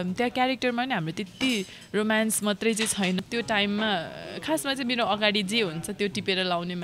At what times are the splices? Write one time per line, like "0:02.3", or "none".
0:03.2